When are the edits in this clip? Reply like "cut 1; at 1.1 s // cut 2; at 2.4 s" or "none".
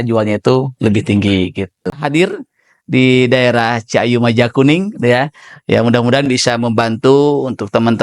cut 1; at 2.0 s